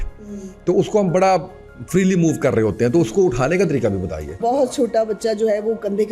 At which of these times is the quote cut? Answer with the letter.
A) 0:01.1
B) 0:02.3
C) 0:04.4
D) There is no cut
C